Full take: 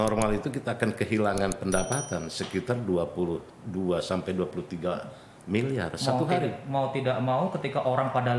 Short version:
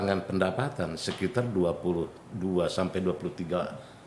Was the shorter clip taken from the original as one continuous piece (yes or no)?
yes